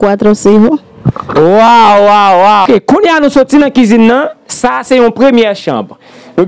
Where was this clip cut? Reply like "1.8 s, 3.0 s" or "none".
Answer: 2.6 s